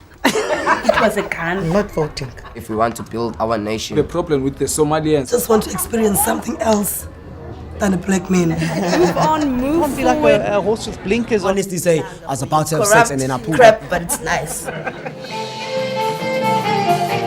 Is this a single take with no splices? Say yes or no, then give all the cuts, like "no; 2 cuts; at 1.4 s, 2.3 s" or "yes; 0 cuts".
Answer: yes; 0 cuts